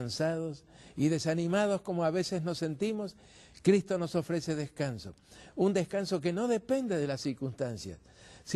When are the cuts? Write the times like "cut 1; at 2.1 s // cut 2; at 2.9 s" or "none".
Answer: cut 1; at 3.1 s